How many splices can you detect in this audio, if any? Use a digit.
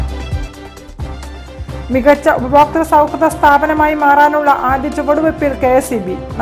1